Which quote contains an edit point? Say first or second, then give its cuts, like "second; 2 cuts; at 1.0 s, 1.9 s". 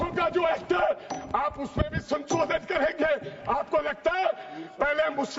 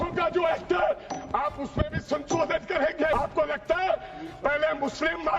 second; 1 cut; at 3.1 s